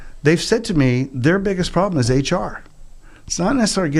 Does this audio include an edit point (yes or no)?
no